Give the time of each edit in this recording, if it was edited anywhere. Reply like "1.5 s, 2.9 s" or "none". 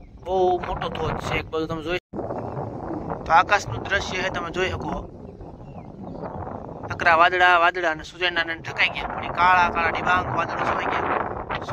2.0 s